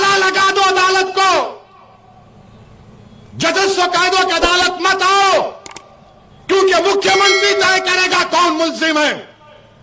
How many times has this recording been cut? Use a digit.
0